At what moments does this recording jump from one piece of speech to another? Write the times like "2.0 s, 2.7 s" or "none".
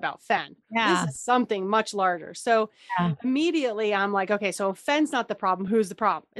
none